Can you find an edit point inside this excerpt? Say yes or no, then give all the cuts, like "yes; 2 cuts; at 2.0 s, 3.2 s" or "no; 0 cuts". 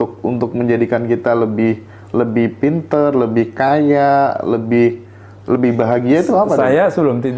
no; 0 cuts